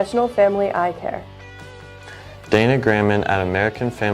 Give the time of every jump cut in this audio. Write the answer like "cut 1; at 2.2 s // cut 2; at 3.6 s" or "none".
cut 1; at 1.1 s